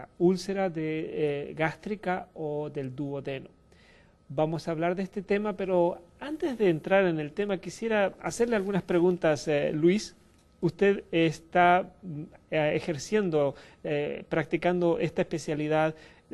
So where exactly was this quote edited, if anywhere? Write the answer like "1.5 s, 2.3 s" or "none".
11.1 s